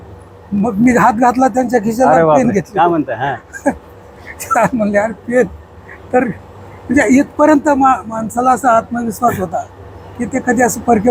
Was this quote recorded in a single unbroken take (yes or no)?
yes